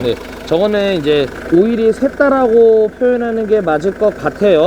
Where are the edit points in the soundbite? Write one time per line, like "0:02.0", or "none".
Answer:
none